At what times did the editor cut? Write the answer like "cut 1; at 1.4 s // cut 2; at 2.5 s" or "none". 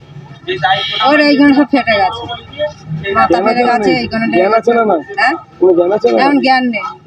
none